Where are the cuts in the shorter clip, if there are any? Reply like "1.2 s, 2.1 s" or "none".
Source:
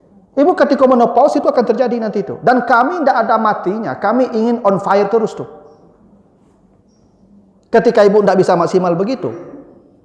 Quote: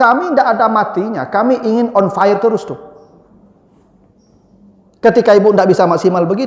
none

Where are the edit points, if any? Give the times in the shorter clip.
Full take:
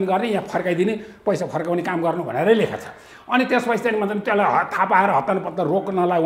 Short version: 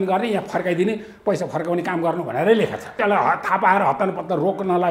2.9 s

